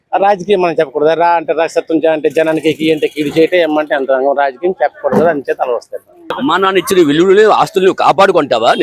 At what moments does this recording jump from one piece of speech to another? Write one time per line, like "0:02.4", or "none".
0:06.4